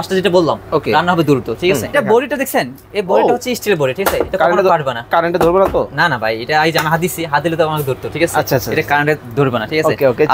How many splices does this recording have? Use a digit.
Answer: 1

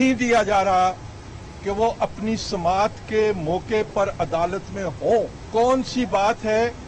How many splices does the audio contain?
1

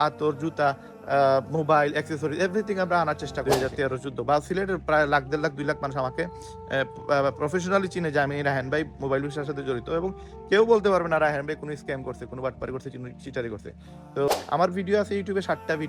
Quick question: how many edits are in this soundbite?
2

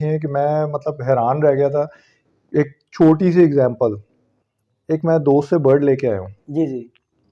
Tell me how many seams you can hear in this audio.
0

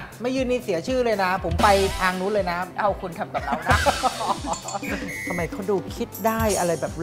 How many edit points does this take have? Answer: 2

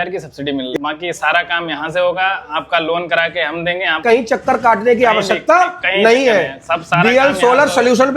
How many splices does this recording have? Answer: 2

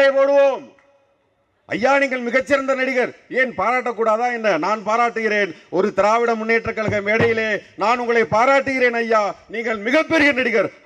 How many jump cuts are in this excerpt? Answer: 0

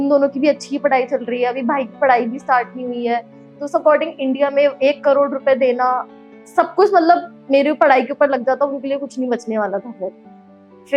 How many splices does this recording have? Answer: 0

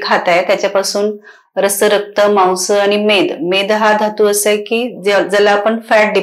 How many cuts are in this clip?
0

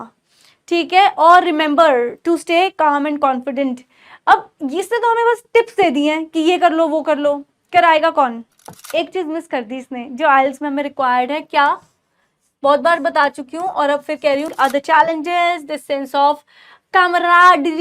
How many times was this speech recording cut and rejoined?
2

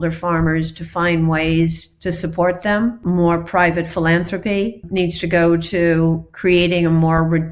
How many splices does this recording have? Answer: 4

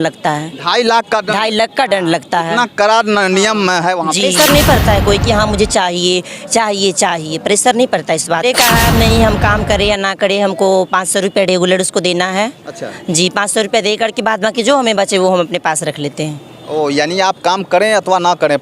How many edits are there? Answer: 2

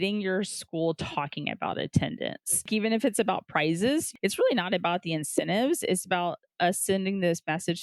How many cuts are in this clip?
2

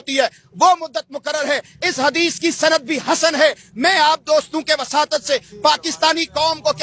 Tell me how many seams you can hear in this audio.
0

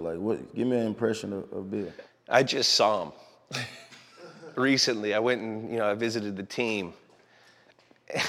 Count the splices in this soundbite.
1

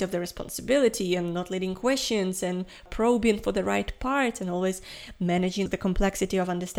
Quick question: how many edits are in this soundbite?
2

